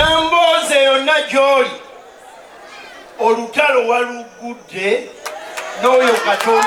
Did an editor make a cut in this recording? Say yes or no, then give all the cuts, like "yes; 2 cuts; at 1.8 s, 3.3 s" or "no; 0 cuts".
no; 0 cuts